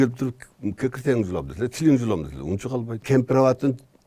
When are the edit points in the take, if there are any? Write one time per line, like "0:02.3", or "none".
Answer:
0:03.0